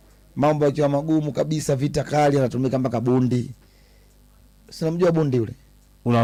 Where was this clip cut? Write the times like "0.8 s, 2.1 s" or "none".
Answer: none